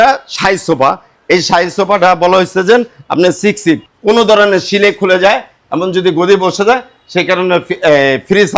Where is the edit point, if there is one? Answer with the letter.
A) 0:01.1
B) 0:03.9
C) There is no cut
B